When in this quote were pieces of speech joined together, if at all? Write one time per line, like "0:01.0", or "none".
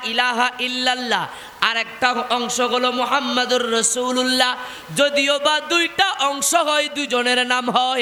none